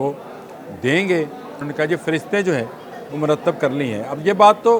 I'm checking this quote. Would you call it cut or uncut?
cut